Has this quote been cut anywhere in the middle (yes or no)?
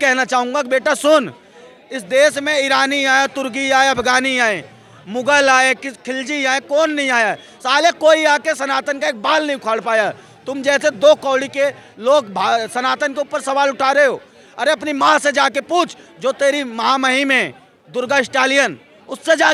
no